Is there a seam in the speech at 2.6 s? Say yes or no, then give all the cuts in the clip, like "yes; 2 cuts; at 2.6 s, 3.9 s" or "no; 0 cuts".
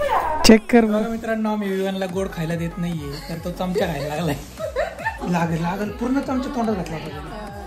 no; 2 cuts; at 1.0 s, 5.2 s